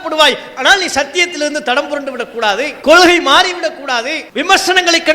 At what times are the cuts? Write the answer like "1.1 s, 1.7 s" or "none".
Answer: 2.7 s, 4.2 s